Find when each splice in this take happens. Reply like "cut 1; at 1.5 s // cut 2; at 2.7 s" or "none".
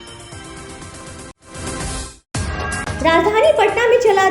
cut 1; at 1.3 s